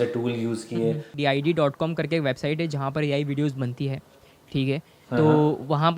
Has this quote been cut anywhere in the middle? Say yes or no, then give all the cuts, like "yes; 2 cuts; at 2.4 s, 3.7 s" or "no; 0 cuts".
yes; 1 cut; at 1.1 s